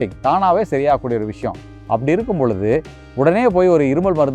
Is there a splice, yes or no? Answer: no